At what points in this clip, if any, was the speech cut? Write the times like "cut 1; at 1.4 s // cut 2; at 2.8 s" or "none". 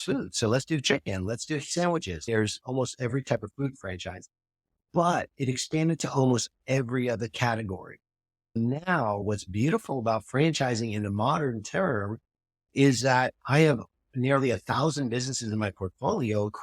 cut 1; at 2.2 s // cut 2; at 9.2 s